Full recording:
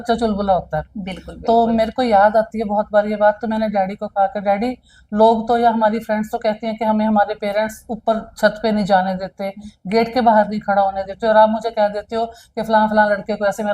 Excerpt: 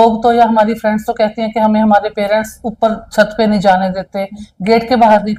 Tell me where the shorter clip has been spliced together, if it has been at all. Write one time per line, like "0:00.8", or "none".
none